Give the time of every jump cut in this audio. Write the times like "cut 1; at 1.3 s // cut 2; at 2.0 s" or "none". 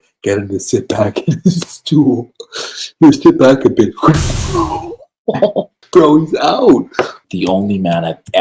cut 1; at 5.8 s // cut 2; at 7.2 s